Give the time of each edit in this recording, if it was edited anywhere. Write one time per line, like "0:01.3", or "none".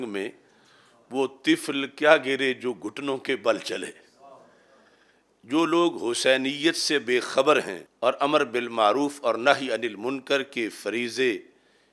0:07.8